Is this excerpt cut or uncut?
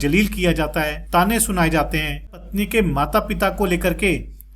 cut